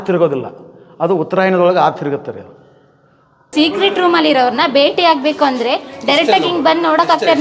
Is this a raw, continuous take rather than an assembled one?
no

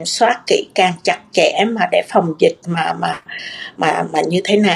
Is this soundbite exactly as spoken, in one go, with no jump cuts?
yes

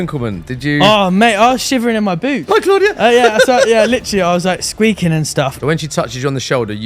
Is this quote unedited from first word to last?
no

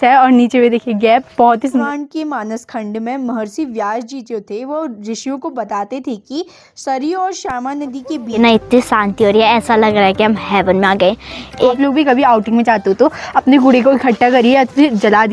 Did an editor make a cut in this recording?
yes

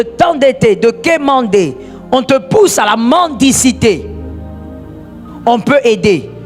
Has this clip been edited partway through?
yes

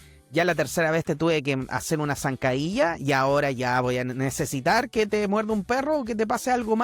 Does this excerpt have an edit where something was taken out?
no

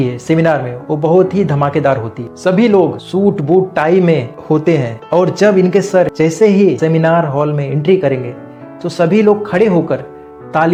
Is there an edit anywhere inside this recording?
no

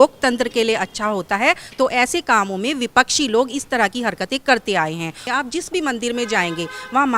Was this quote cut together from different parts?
yes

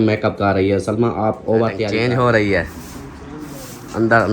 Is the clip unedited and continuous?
no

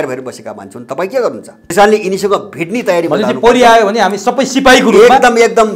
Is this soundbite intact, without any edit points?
no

